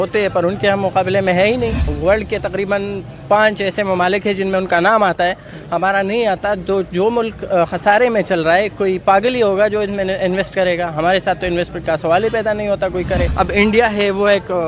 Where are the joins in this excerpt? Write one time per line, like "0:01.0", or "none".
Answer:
0:01.9
0:13.3